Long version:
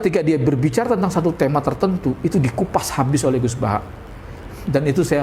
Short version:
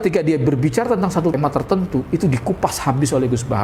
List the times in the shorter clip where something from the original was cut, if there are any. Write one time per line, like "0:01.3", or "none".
0:01.4